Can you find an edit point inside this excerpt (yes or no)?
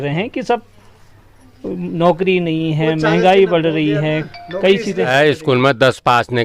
yes